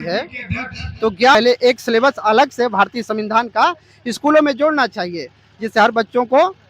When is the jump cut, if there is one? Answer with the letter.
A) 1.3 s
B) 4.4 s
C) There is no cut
A